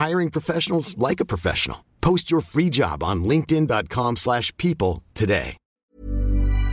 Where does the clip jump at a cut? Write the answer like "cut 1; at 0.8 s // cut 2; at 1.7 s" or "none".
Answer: cut 1; at 5.6 s